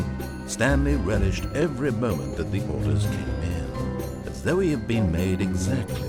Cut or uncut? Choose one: uncut